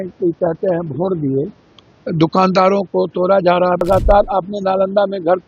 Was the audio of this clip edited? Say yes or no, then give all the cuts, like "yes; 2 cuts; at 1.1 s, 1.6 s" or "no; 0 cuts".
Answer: yes; 1 cut; at 3.8 s